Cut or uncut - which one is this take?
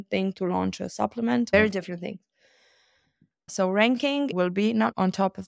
cut